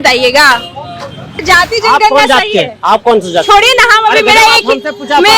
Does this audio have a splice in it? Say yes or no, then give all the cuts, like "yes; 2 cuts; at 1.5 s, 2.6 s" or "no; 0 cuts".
yes; 1 cut; at 1.2 s